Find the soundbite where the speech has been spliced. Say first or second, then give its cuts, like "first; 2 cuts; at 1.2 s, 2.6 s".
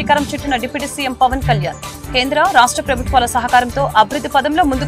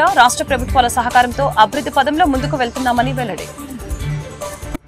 second; 1 cut; at 3.4 s